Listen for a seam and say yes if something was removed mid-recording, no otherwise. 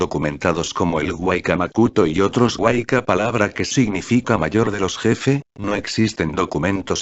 yes